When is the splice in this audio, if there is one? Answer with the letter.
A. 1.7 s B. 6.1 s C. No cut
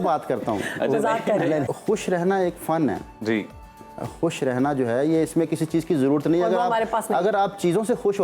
A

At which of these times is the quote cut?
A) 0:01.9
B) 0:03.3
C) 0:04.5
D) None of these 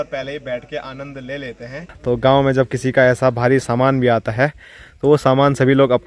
A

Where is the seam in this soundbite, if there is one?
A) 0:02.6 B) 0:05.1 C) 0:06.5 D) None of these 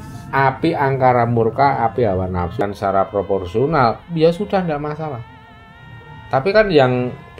A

